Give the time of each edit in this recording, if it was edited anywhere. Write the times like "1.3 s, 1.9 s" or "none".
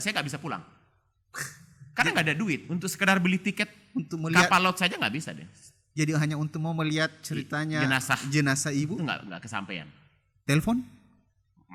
none